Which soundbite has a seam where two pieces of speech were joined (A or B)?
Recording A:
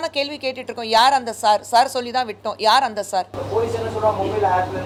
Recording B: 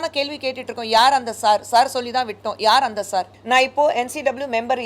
B